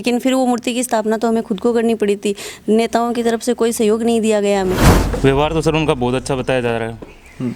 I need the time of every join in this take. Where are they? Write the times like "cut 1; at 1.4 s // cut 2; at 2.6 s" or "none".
cut 1; at 5.0 s